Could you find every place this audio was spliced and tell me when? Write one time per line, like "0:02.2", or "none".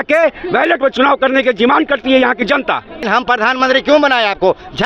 0:03.0